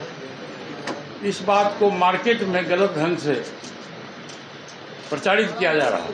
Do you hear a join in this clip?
no; 0 cuts

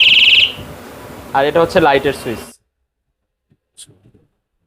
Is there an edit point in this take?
no; 0 cuts

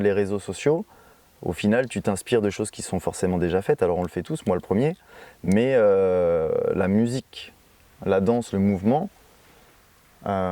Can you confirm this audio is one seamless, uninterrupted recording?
yes; 0 cuts

